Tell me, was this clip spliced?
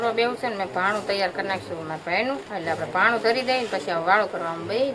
no; 0 cuts

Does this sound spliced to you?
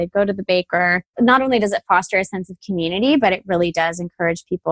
no; 0 cuts

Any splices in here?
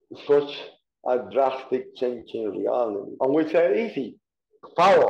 yes; 1 cut; at 3.1 s

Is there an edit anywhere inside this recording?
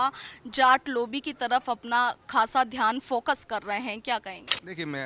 no; 0 cuts

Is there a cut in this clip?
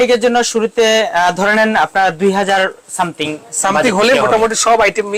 no; 0 cuts

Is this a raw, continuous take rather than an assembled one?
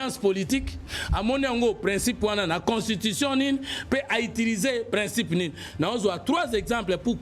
yes; 0 cuts

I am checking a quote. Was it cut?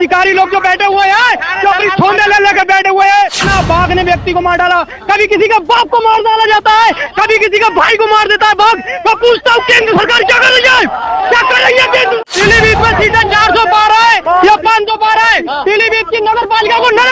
yes; 2 cuts; at 3.5 s, 12.3 s

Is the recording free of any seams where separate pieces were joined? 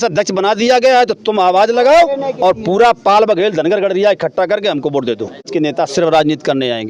no; 1 cut; at 5.5 s

